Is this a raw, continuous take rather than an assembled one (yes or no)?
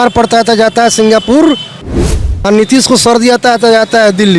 no